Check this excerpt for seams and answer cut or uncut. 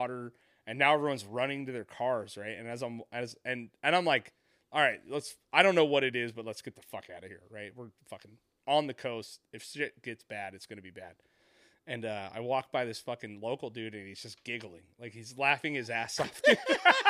uncut